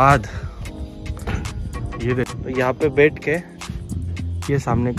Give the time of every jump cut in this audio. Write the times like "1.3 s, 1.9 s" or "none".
2.3 s

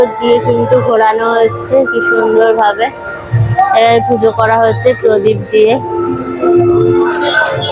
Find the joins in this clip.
none

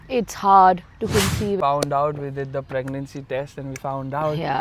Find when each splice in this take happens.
1.6 s

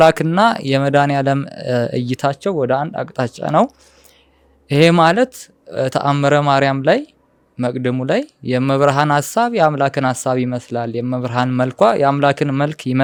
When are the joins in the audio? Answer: none

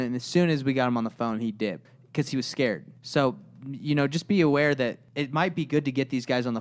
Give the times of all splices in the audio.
1.9 s, 2.9 s, 5.1 s

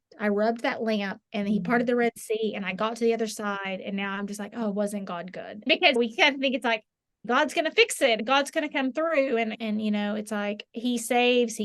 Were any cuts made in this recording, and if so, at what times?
5.6 s, 7.2 s, 8.2 s, 9.5 s

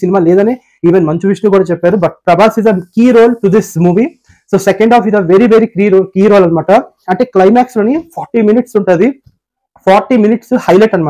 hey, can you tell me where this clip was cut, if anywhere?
none

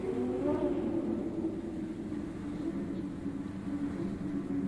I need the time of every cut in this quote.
none

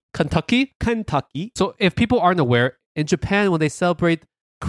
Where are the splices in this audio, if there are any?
1.5 s, 2.8 s

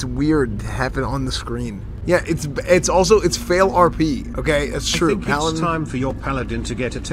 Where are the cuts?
1.9 s

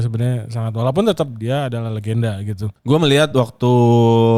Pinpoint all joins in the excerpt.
2.7 s

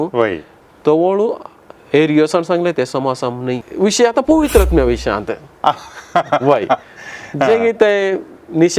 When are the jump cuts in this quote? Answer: 3.6 s

